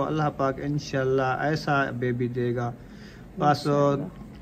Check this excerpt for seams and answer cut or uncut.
uncut